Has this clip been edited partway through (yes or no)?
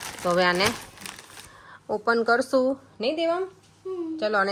no